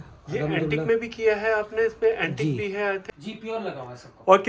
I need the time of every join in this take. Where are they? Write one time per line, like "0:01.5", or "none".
0:03.1